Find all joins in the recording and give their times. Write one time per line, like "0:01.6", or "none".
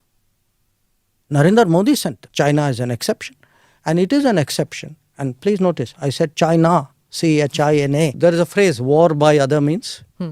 0:02.2
0:08.1